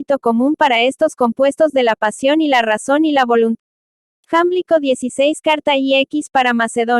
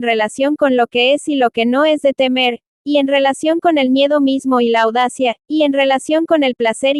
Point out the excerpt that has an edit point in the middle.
first; 1 cut; at 3.6 s

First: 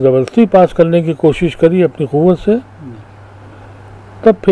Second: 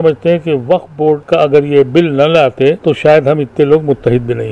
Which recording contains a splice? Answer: second; 2 cuts; at 1.2 s, 2.8 s

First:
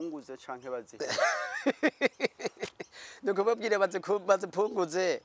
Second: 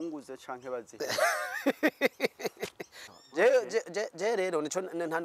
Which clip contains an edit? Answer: second; 1 cut; at 3.1 s

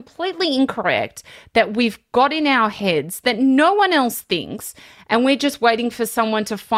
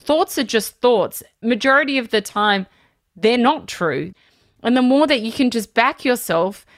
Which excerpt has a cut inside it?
second; 2 cuts; at 1.4 s, 4.1 s

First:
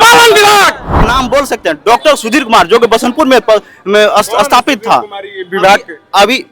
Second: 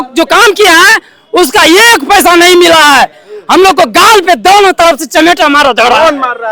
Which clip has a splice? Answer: first; 1 cut; at 0.9 s

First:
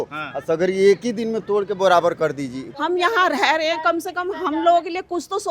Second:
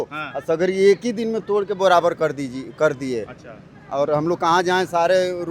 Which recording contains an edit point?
first; 1 cut; at 2.6 s

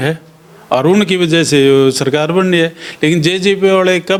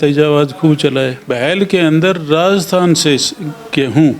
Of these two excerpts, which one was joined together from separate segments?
second; 1 cut; at 1.2 s

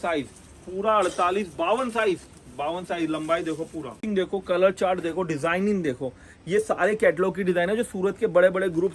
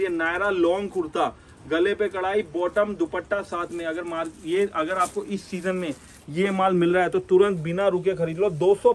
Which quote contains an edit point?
first; 1 cut; at 4.0 s

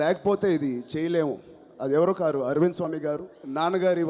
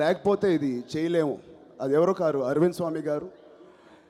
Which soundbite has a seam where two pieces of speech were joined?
first; 1 cut; at 3.1 s

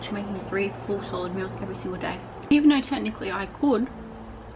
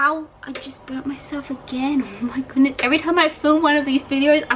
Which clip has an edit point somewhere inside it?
first; 1 cut; at 2.5 s

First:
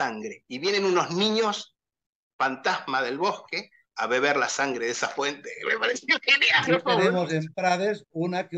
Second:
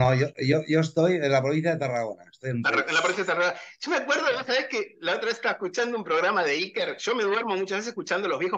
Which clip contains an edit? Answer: first; 1 cut; at 6.6 s

